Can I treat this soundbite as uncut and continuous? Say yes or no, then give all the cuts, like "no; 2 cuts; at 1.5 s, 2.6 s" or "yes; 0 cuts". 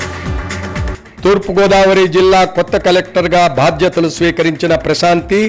no; 1 cut; at 0.9 s